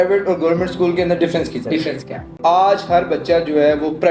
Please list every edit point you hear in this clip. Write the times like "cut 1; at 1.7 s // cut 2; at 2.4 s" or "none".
cut 1; at 2.3 s